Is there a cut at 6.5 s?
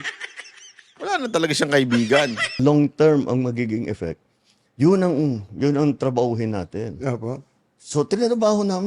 no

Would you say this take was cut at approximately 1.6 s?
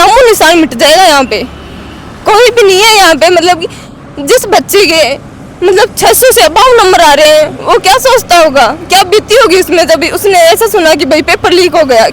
no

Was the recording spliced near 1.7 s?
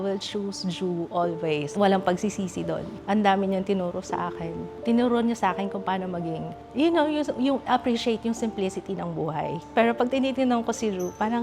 yes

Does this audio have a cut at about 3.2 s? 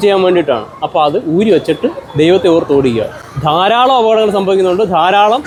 no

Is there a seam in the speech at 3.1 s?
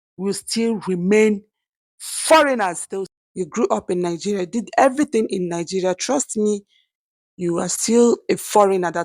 yes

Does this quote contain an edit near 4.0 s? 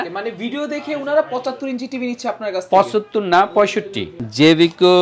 yes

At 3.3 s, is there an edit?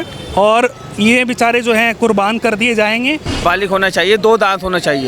yes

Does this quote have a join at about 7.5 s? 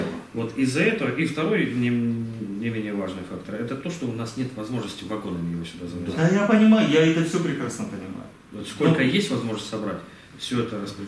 no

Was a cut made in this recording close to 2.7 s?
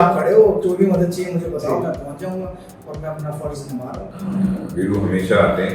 no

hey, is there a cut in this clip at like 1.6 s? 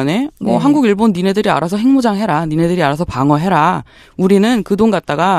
no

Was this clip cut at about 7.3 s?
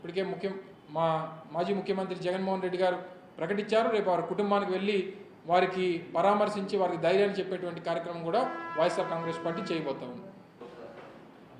no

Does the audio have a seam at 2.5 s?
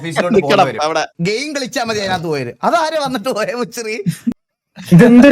no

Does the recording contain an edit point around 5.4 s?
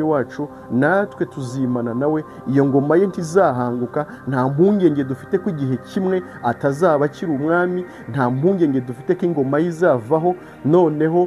no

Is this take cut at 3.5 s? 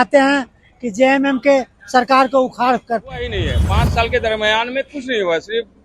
yes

